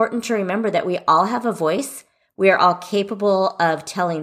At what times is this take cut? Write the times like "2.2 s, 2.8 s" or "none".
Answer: none

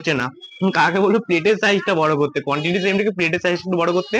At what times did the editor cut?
none

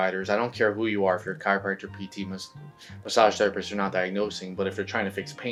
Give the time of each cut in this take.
none

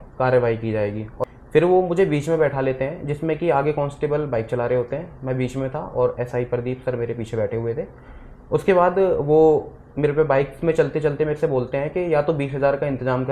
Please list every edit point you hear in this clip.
1.1 s

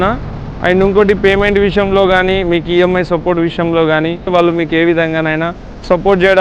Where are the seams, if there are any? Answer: 4.3 s

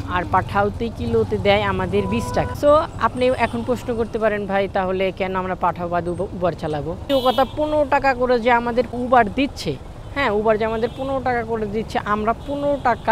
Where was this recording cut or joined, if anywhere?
2.5 s, 7.0 s, 8.9 s

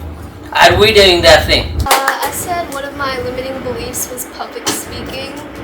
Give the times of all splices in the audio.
1.8 s

